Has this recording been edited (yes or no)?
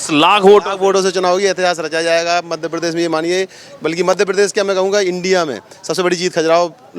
no